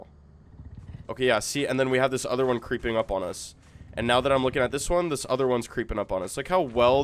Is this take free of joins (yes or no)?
yes